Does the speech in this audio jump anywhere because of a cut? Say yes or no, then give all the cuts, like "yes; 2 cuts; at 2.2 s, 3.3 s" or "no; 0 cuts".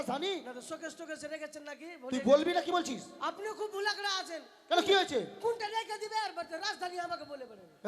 no; 0 cuts